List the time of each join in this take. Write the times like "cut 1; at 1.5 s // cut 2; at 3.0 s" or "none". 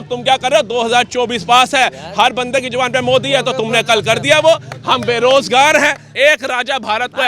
cut 1; at 6.0 s